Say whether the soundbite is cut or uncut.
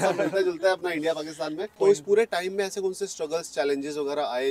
cut